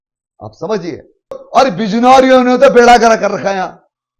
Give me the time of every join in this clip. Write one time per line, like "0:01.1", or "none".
0:01.4